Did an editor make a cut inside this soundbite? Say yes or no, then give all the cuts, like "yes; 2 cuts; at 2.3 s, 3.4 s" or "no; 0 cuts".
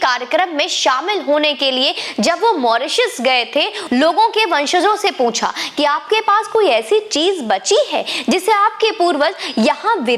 yes; 1 cut; at 3.8 s